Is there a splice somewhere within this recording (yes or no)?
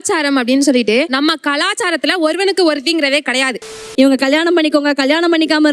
yes